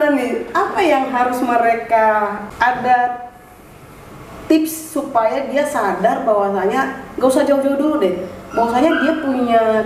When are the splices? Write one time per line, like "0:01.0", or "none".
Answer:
none

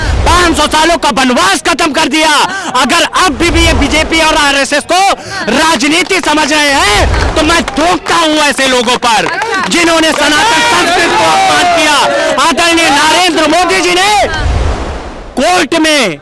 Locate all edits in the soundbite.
none

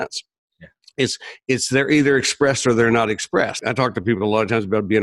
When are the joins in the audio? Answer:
0:03.6

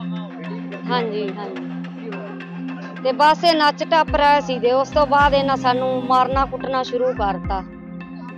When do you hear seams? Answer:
none

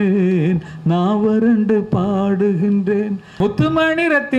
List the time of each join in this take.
0:03.2

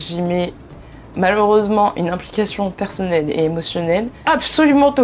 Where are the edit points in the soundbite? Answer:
0:04.1

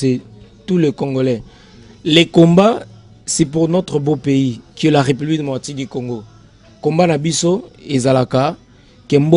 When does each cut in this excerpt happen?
none

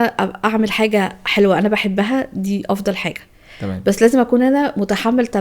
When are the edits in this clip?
none

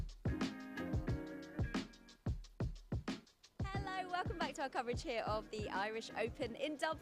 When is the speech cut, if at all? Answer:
0:03.6

